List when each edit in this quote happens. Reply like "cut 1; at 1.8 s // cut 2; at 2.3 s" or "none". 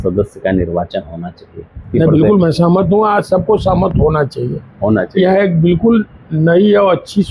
cut 1; at 1.8 s